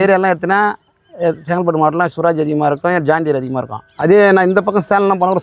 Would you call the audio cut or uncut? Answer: uncut